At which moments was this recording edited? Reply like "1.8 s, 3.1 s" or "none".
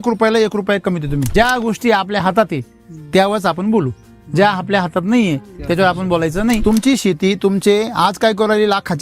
1.3 s, 6.6 s